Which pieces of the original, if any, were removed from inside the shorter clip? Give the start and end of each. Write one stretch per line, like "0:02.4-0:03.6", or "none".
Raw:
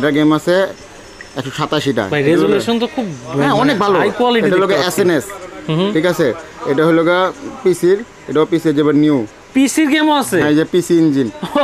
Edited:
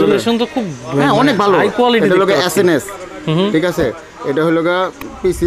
none

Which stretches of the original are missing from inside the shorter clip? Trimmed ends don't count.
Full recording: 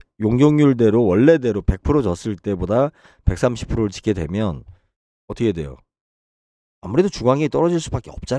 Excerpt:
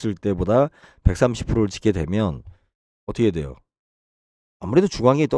none

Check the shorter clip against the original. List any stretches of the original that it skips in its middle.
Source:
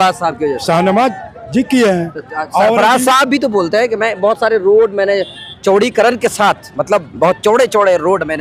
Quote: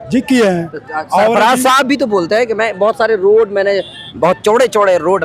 0:05.5-0:07.1

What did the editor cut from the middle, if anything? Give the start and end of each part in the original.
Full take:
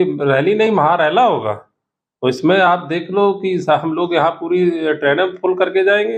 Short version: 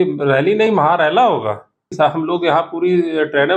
0:01.9-0:03.6

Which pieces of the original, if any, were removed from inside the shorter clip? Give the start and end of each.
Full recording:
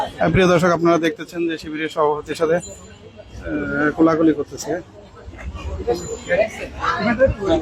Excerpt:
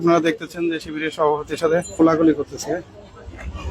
0:02.7-0:03.9

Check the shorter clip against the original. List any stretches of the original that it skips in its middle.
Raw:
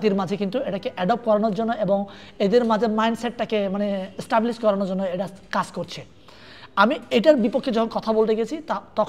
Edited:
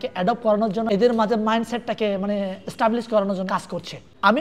0:01.7-0:02.4
0:05.0-0:06.0

